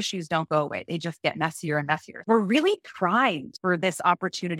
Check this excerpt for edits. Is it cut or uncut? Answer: cut